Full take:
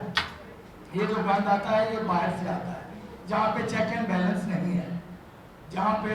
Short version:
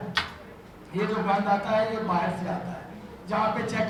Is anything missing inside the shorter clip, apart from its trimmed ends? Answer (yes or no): no